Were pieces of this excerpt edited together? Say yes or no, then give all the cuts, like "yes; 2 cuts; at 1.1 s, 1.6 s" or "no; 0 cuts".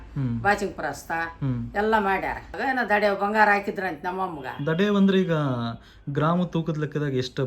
yes; 1 cut; at 2.5 s